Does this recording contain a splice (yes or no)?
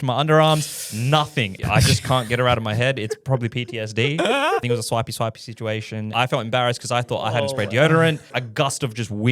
yes